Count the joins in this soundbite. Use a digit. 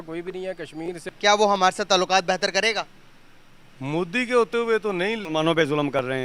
2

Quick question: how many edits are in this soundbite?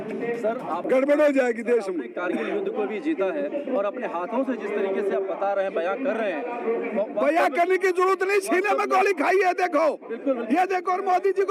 0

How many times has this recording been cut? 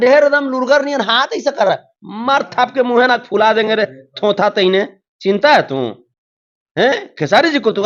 0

